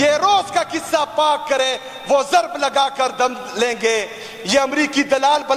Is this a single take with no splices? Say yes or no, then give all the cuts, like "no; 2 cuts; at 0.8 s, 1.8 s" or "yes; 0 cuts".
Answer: yes; 0 cuts